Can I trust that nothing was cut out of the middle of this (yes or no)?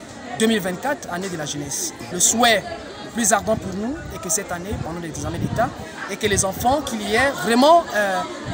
no